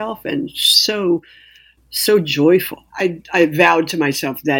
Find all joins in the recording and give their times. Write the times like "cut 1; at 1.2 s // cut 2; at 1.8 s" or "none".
cut 1; at 2.8 s